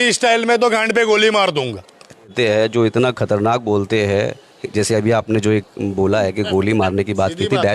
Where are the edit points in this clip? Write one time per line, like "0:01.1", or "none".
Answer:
0:02.3